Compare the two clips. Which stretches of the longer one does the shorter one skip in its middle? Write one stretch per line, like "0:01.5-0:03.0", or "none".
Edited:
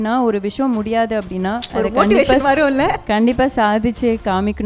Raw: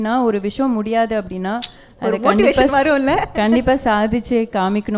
0:01.6-0:01.9